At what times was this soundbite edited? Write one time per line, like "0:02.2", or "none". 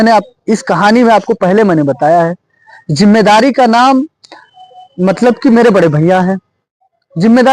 none